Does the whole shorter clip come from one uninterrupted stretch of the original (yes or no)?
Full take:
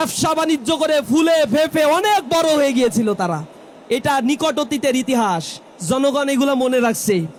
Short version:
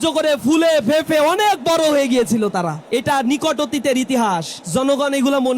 no